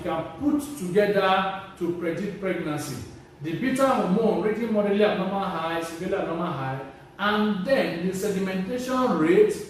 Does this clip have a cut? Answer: no; 0 cuts

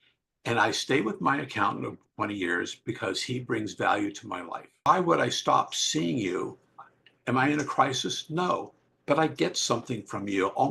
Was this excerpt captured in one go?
no; 1 cut; at 4.9 s

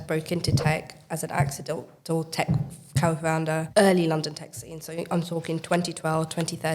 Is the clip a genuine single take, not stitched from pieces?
no; 1 cut; at 1.9 s

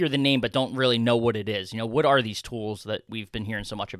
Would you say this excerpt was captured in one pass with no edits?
no; 1 cut; at 3.1 s

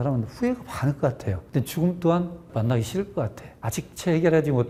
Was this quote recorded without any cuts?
yes; 0 cuts

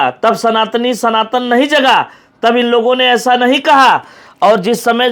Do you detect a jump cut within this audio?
no; 0 cuts

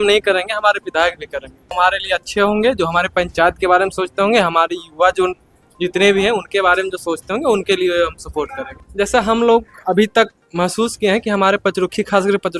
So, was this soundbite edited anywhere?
yes; 2 cuts; at 1.7 s, 8.7 s

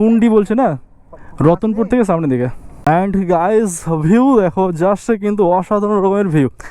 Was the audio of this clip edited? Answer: yes; 1 cut; at 2.6 s

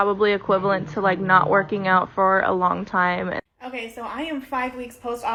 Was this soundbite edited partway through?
no; 0 cuts

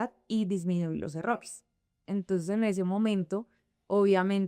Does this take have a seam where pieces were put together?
yes; 1 cut; at 1.9 s

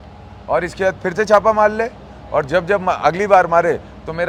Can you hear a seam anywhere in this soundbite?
no; 0 cuts

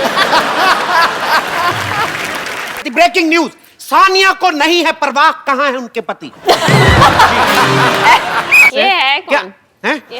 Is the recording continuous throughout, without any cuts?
no; 2 cuts; at 2.9 s, 8.6 s

